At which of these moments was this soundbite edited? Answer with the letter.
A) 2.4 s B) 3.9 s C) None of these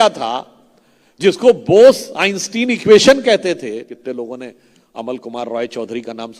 B